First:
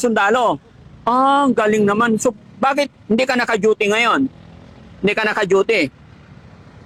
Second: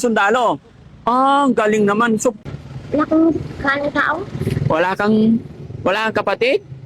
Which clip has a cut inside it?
second; 1 cut; at 2.5 s

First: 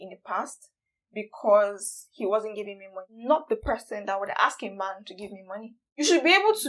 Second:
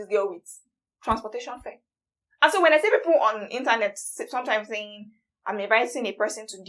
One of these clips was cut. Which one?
first; 2 cuts; at 3.1 s, 6.0 s

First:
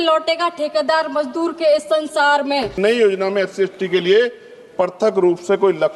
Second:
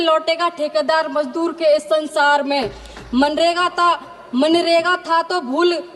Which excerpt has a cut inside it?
first; 1 cut; at 2.8 s

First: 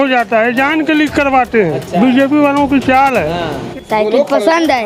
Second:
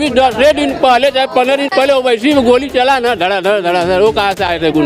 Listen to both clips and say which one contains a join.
first; 1 cut; at 3.6 s

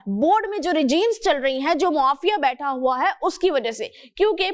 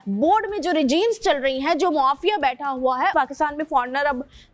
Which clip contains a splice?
second; 1 cut; at 3.1 s

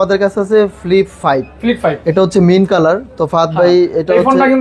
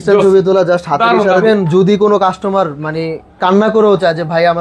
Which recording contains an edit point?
second; 1 cut; at 1.3 s

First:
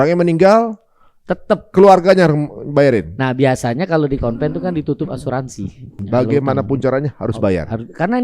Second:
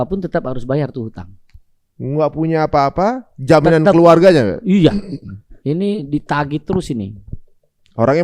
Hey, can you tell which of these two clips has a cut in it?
first; 1 cut; at 5.9 s

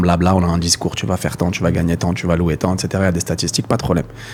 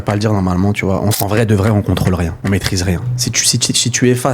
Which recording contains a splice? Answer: second; 2 cuts; at 1.2 s, 2.4 s

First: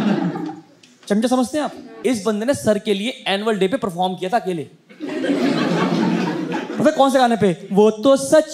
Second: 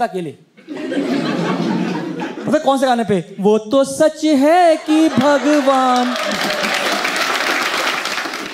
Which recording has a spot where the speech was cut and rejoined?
first; 1 cut; at 1.8 s

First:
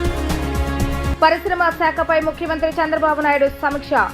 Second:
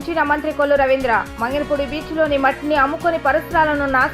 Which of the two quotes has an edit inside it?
first; 1 cut; at 1.1 s

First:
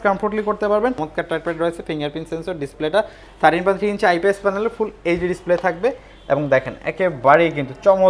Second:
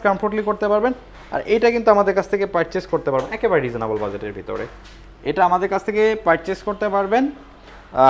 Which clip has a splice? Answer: first; 1 cut; at 1.1 s

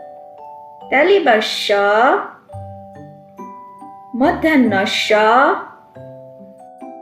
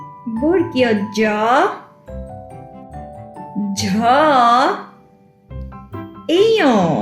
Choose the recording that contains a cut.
second; 2 cuts; at 1.9 s, 3.5 s

